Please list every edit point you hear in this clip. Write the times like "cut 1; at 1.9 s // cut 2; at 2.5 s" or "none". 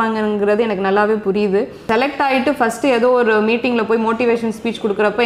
cut 1; at 1.8 s